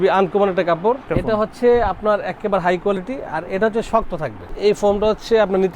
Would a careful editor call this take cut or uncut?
cut